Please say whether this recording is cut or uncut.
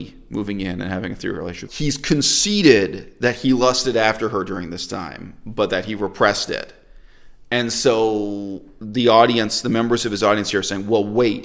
cut